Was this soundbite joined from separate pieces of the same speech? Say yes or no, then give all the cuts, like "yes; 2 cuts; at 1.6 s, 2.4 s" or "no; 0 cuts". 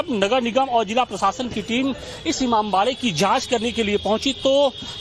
no; 0 cuts